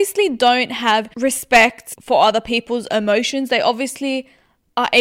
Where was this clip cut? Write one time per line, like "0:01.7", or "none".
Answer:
0:01.1
0:01.9